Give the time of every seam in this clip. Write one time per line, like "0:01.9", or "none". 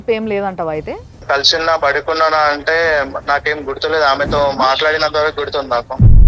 0:01.2